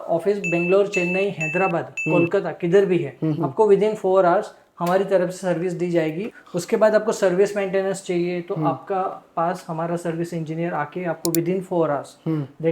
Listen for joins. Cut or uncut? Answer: cut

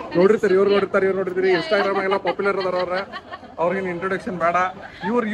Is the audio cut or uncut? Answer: uncut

